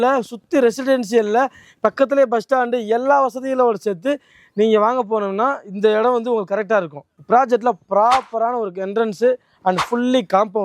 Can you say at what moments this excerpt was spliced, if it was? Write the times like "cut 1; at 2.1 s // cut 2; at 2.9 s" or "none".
cut 1; at 7.0 s